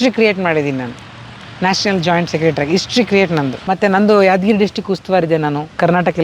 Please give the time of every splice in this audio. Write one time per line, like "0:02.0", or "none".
0:03.6